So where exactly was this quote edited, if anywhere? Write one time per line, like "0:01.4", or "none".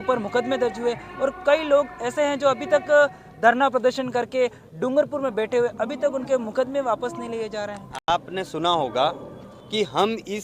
none